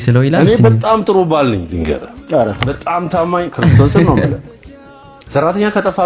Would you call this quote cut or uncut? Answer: uncut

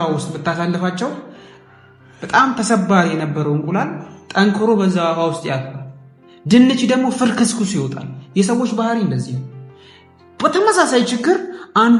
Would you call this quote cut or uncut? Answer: uncut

